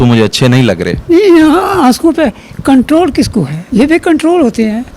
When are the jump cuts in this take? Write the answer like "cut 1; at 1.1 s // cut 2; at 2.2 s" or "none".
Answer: cut 1; at 1.0 s

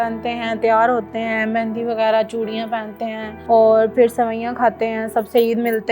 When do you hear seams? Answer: cut 1; at 3.3 s

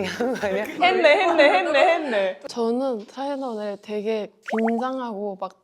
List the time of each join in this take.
cut 1; at 2.4 s

